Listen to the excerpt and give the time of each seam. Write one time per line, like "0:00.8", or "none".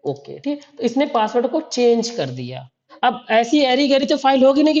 0:02.9